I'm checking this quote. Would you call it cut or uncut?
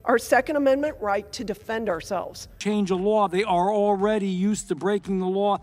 cut